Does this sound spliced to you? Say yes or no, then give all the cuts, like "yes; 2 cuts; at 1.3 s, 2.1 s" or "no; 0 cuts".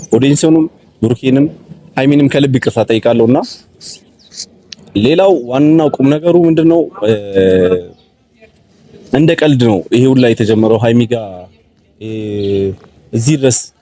no; 0 cuts